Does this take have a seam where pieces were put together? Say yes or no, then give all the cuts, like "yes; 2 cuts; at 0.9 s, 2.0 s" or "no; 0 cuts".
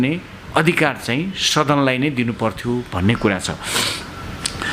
no; 0 cuts